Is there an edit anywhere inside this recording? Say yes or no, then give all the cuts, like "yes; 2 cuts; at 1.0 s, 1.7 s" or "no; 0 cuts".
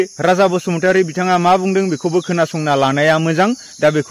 no; 0 cuts